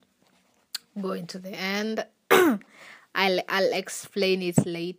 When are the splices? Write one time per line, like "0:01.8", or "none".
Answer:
none